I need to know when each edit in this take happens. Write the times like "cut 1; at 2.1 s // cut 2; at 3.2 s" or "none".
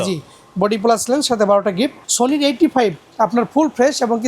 cut 1; at 2.0 s